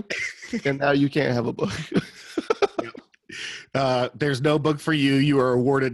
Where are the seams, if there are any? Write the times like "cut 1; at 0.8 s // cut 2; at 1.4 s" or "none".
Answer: none